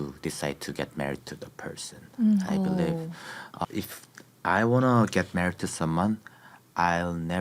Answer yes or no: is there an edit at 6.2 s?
yes